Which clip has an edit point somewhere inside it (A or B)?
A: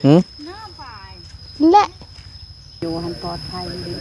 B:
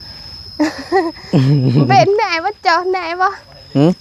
A